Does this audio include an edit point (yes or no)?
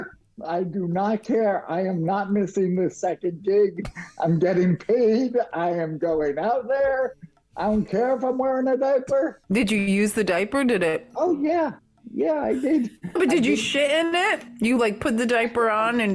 yes